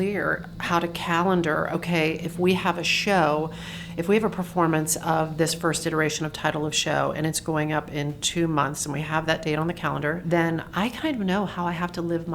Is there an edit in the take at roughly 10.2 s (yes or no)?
yes